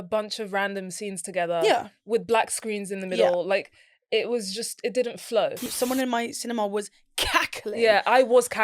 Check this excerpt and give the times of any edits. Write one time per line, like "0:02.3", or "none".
0:05.6